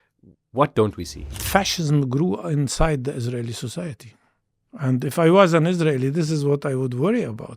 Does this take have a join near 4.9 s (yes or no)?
no